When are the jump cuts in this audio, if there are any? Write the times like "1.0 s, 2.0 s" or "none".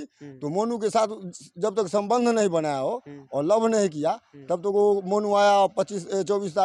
none